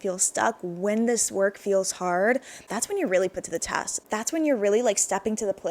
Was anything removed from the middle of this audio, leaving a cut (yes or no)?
yes